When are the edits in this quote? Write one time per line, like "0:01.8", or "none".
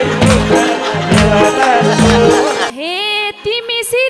0:02.8